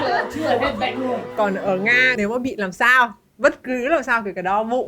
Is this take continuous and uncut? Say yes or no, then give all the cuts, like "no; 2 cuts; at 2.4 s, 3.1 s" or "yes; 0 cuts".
no; 2 cuts; at 1.3 s, 2.1 s